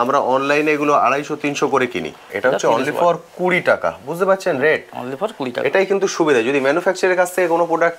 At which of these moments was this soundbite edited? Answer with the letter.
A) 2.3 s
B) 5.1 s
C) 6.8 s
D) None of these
A